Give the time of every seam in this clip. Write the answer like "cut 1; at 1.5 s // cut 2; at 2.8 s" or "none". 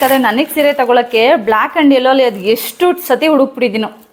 none